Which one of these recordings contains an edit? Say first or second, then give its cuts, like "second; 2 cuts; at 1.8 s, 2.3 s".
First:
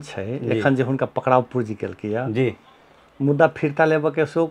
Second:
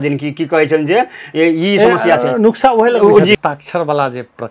second; 1 cut; at 3.3 s